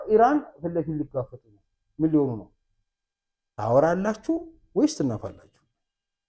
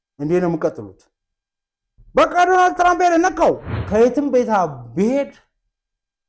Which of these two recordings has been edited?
second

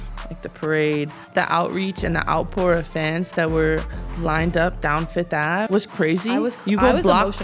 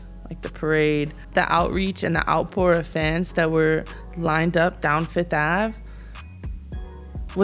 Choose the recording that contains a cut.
first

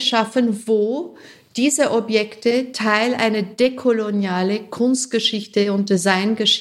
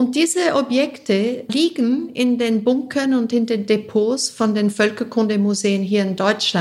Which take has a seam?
second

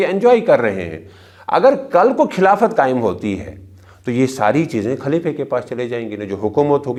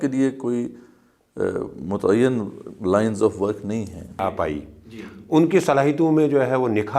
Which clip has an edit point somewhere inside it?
second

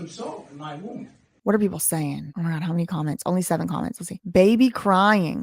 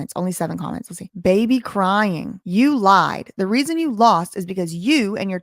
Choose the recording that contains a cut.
first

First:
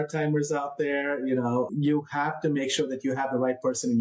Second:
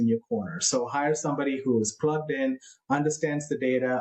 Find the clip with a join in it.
first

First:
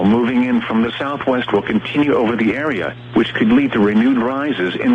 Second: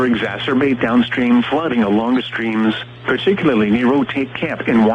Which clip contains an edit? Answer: first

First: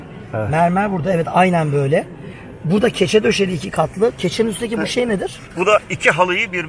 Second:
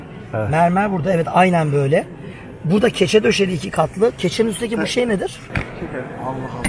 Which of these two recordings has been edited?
second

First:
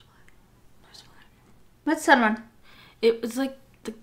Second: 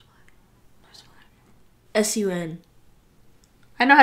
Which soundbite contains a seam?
second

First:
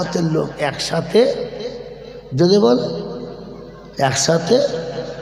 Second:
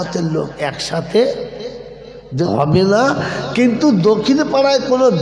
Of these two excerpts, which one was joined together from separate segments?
second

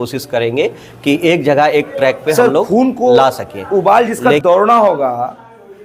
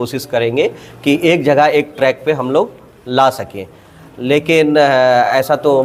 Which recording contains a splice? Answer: first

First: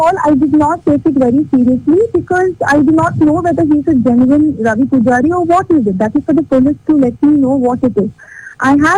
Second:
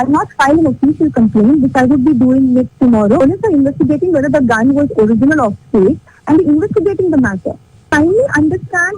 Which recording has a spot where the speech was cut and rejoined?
second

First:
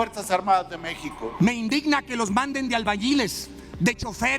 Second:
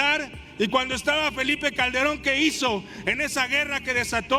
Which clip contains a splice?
first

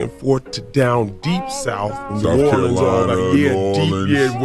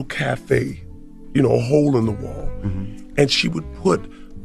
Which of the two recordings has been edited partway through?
first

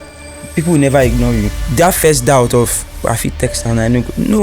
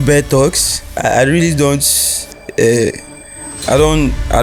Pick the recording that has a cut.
first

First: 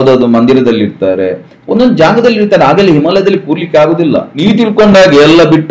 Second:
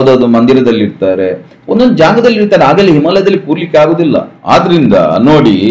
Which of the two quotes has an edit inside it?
first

